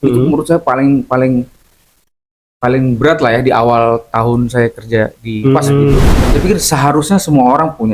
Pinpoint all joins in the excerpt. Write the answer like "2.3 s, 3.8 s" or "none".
6.2 s